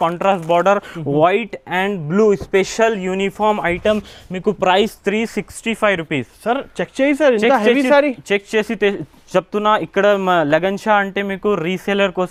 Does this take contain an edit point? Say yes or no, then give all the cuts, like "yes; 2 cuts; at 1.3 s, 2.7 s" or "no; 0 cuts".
no; 0 cuts